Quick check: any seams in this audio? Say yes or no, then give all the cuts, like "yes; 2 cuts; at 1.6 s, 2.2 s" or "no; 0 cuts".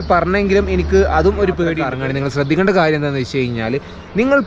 yes; 1 cut; at 1.9 s